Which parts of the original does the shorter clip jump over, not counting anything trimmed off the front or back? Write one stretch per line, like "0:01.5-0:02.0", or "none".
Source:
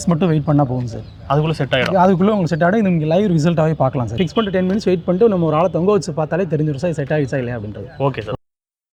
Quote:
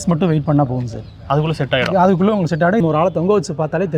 0:02.8-0:05.4